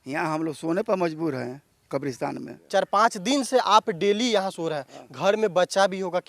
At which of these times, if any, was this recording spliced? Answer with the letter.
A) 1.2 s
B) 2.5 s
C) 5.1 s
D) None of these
B